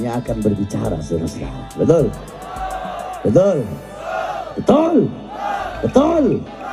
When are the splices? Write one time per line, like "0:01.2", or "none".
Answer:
none